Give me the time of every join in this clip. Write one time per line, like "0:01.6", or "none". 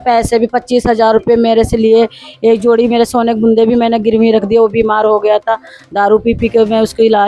none